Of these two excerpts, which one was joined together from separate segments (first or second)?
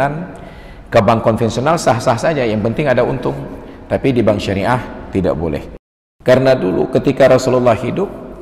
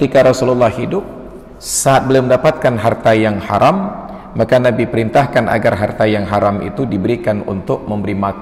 first